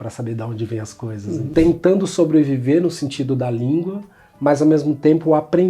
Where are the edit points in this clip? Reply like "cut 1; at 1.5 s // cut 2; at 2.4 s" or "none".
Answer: cut 1; at 1.4 s

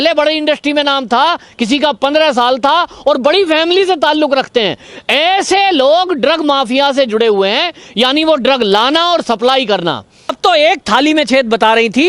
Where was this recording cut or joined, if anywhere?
cut 1; at 10.4 s

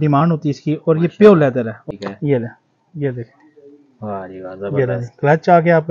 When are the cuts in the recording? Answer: cut 1; at 1.8 s

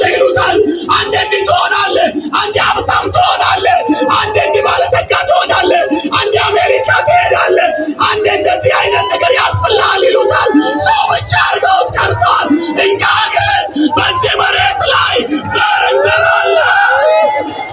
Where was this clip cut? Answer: none

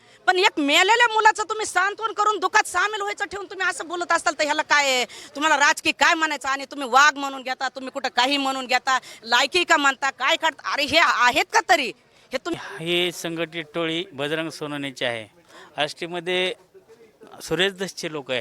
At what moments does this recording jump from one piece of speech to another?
cut 1; at 12.5 s

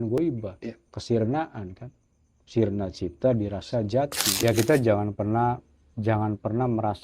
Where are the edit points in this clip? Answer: cut 1; at 4.4 s

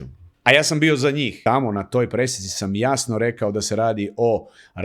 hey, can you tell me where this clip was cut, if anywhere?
cut 1; at 1.3 s

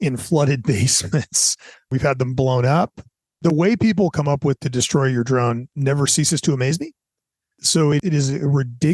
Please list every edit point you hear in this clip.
cut 1; at 1.9 s

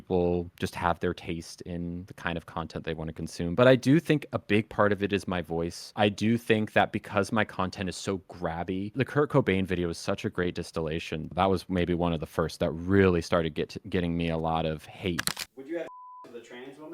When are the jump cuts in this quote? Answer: cut 1; at 15.3 s

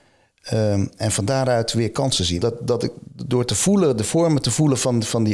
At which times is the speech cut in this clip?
cut 1; at 2.4 s

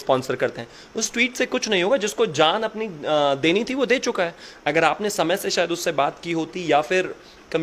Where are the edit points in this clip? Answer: none

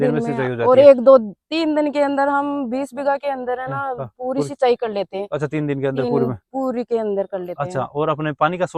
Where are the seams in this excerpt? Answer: none

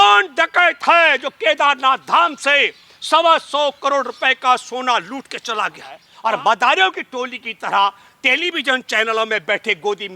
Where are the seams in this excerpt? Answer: cut 1; at 6.1 s

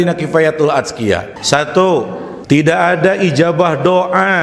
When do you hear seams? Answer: cut 1; at 1.3 s // cut 2; at 2.3 s

